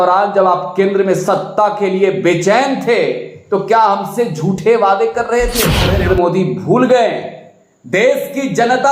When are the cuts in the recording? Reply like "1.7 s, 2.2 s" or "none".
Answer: 5.9 s